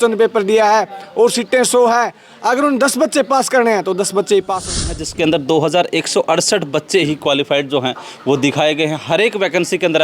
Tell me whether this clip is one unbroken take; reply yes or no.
no